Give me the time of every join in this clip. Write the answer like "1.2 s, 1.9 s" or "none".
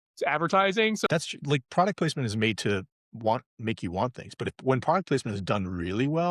1.1 s